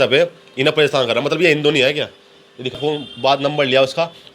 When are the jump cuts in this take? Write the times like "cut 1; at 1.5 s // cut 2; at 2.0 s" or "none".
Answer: cut 1; at 2.8 s